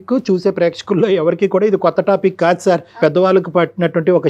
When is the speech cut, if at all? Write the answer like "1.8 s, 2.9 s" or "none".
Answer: 3.0 s